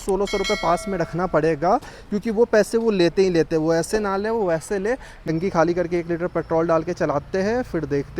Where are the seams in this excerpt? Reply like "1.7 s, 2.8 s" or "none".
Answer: 5.3 s